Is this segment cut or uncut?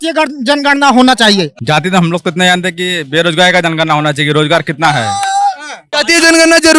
cut